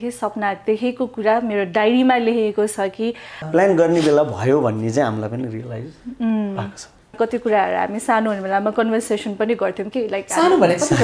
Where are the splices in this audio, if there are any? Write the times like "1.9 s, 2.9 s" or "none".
3.4 s, 7.1 s